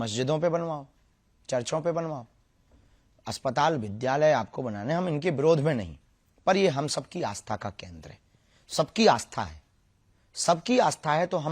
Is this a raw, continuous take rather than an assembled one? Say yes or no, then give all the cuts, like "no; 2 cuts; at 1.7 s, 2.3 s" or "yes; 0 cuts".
yes; 0 cuts